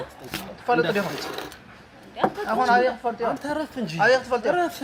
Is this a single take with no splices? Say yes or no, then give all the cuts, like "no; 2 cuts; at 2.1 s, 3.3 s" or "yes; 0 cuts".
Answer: yes; 0 cuts